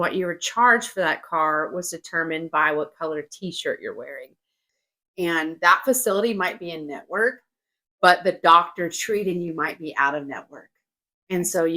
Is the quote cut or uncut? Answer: cut